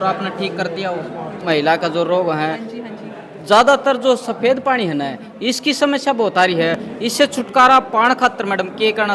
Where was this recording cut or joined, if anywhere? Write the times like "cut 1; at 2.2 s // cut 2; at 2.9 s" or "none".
cut 1; at 1.4 s // cut 2; at 7.2 s